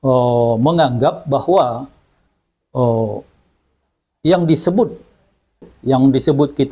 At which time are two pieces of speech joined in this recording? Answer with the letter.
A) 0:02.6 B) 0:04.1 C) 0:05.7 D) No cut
C